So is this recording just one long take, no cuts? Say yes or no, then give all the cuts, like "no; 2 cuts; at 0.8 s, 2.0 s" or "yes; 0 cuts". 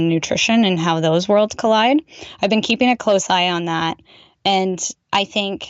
yes; 0 cuts